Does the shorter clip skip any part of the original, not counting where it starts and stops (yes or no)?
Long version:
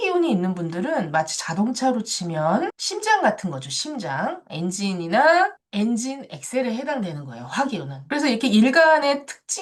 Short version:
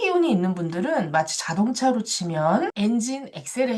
yes